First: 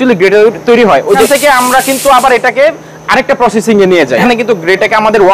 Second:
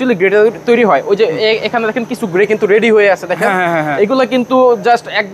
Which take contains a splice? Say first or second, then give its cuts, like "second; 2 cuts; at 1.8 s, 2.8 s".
first; 2 cuts; at 1.2 s, 4.2 s